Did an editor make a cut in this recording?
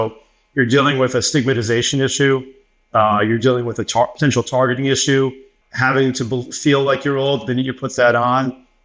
yes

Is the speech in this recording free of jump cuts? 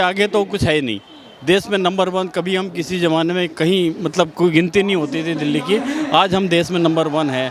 yes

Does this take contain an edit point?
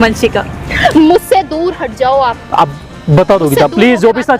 no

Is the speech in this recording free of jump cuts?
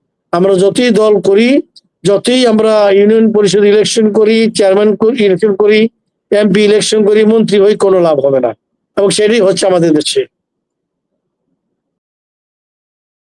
yes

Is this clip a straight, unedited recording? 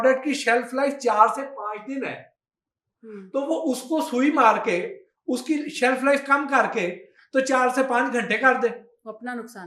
yes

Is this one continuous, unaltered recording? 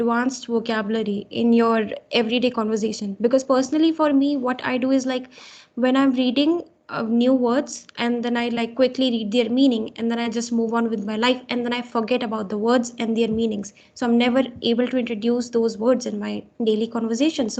yes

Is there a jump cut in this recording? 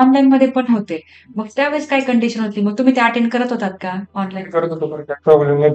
no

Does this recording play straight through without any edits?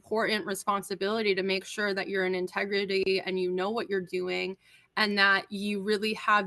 yes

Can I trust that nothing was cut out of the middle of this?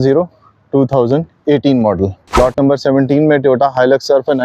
no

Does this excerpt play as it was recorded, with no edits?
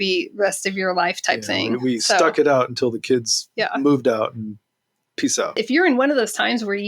no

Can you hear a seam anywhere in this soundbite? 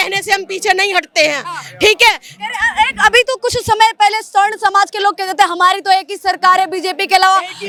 no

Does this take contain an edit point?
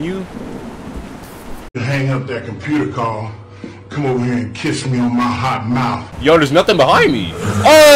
yes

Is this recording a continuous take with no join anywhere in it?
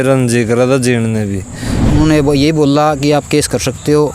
no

